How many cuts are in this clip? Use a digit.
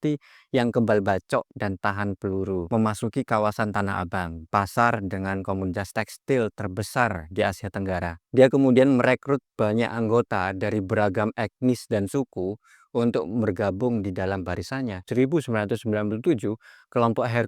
3